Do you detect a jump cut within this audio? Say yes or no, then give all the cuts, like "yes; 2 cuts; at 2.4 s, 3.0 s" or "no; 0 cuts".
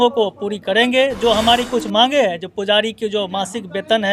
no; 0 cuts